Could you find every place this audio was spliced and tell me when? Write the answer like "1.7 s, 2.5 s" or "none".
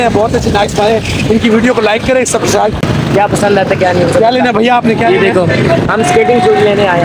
2.9 s